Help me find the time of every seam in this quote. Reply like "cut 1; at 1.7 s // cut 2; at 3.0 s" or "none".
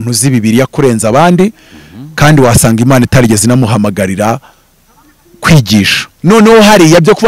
cut 1; at 6.0 s